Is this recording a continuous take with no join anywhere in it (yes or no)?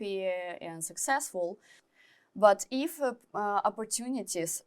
no